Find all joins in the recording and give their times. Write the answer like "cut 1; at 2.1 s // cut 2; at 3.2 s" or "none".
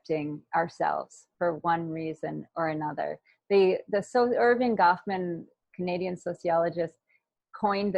none

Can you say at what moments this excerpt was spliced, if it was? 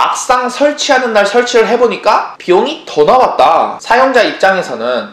cut 1; at 3.8 s

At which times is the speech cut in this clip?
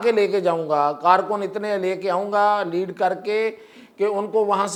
none

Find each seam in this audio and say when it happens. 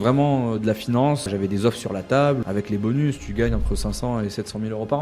cut 1; at 1.3 s // cut 2; at 2.4 s

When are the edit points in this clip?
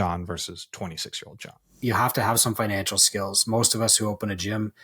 cut 1; at 1.8 s

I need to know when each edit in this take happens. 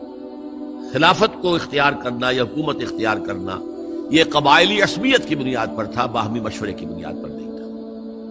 cut 1; at 6.9 s

